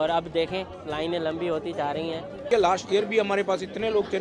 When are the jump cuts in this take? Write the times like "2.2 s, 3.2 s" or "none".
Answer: 2.4 s